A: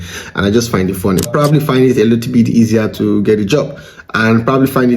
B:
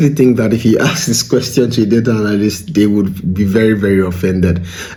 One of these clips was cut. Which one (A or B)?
A